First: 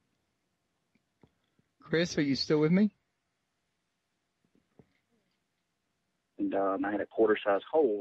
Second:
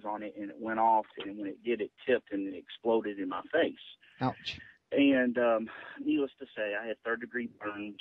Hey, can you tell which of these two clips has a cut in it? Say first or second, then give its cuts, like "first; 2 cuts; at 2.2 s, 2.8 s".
first; 1 cut; at 6.8 s